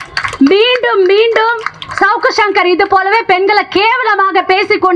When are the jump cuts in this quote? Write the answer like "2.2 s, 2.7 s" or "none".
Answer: none